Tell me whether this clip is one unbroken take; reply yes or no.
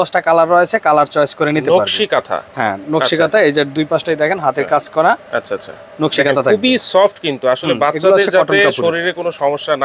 yes